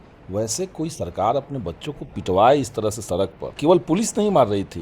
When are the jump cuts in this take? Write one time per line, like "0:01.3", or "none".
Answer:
0:03.4